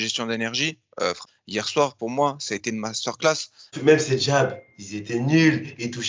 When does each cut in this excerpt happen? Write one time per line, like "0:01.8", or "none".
0:01.2
0:03.7